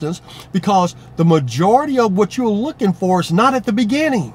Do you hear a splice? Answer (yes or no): no